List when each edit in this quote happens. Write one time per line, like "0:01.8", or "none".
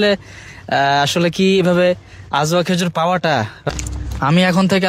0:03.7

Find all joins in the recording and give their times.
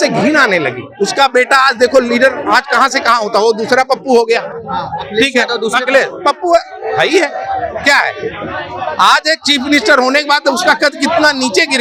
none

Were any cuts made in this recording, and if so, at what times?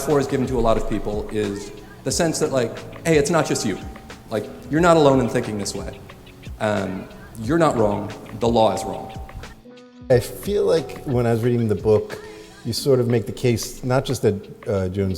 0:10.0

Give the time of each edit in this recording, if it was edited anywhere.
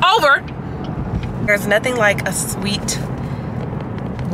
0:01.5

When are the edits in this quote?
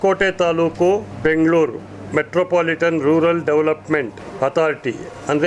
0:01.1
0:04.2

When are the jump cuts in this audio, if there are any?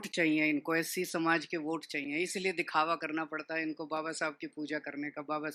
none

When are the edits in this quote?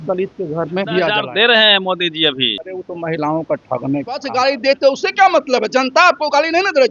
0:01.2
0:02.7
0:04.3

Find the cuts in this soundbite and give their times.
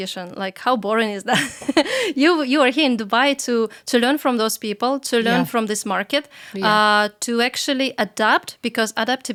none

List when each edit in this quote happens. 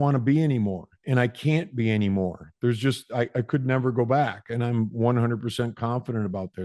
none

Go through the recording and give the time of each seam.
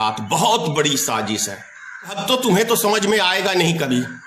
0:02.2

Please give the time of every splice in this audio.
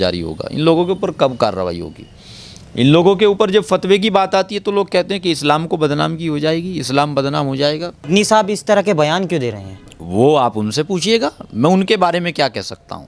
0:08.0

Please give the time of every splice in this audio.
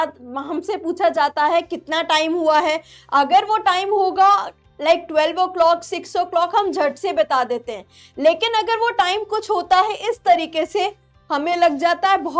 none

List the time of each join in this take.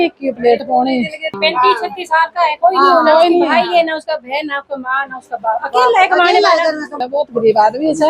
0:01.3
0:06.9

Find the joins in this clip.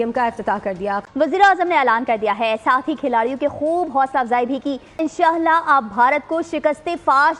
0:01.1
0:05.0

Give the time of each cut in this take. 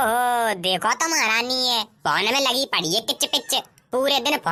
none

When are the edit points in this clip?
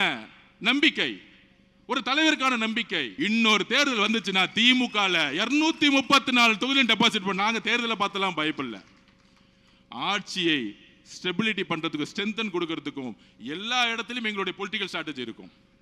0:03.0

